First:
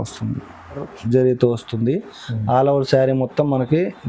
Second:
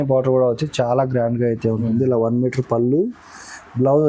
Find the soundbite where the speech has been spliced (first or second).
first